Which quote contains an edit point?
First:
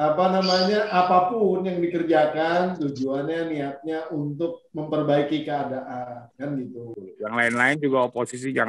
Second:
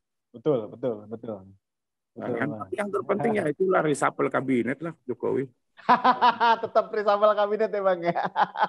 first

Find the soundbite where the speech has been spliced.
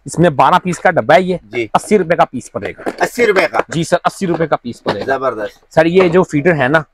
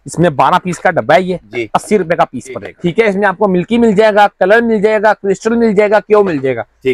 second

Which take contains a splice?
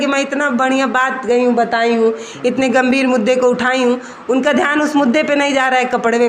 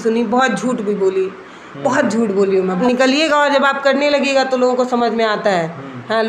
second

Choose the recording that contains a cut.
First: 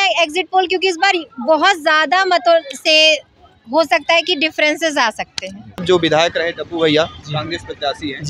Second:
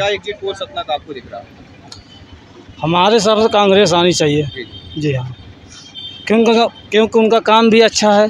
first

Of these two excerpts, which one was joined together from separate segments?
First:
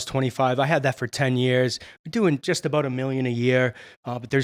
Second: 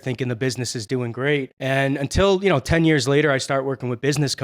second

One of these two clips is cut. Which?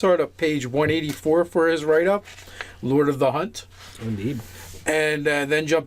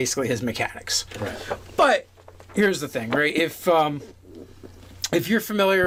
first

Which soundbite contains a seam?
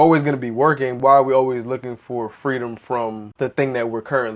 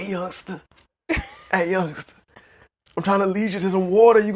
first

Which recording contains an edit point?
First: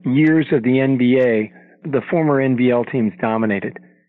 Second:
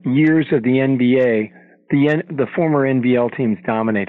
first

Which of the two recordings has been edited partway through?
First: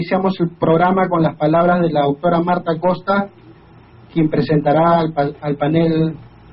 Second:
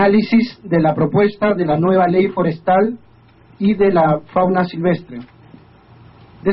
first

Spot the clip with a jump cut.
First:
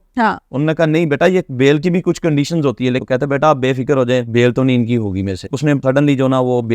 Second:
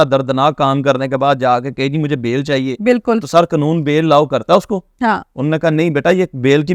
first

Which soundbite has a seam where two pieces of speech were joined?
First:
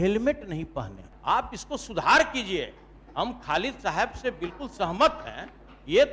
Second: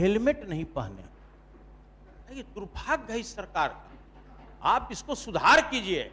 first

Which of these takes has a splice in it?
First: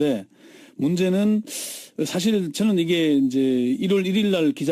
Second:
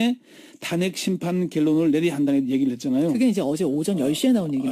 second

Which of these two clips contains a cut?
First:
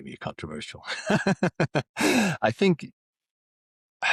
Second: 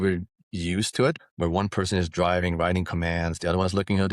second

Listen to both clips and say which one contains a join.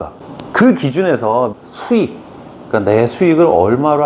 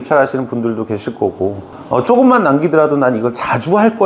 second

